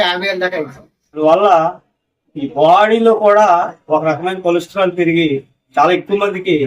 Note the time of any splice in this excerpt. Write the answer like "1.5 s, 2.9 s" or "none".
1.2 s